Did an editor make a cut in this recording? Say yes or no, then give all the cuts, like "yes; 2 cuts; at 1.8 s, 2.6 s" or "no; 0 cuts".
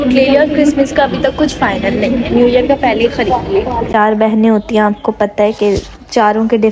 yes; 1 cut; at 3.9 s